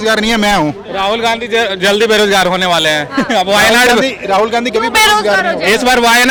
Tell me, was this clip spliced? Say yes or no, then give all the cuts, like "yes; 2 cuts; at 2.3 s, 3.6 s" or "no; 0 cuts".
no; 0 cuts